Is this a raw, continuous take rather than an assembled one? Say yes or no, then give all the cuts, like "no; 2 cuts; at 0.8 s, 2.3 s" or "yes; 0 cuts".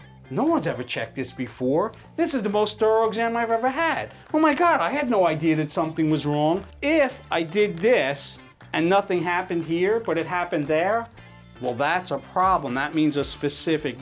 no; 1 cut; at 6.7 s